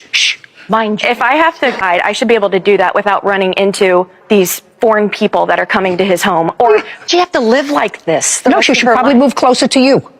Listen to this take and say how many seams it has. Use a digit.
2